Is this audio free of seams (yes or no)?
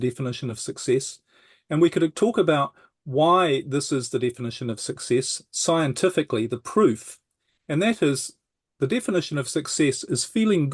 yes